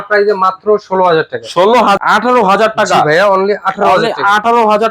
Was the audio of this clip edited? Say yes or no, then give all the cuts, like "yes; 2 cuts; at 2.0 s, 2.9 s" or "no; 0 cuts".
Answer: yes; 1 cut; at 2.0 s